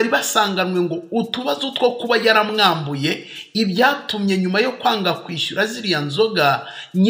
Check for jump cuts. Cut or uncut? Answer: uncut